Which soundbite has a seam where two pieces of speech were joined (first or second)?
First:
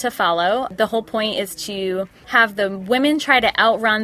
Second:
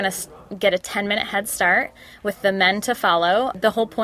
first